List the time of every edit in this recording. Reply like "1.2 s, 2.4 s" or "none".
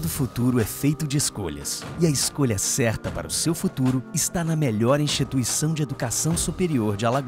none